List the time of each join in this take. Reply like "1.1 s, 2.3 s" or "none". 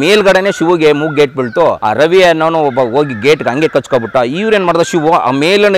1.8 s